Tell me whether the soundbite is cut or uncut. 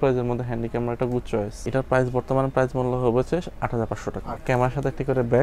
cut